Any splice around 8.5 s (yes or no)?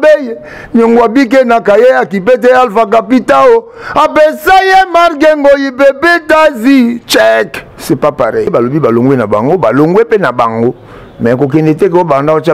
yes